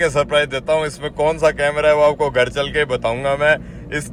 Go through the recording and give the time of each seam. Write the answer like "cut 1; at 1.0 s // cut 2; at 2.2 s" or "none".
none